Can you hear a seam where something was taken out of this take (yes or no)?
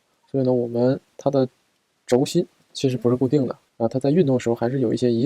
yes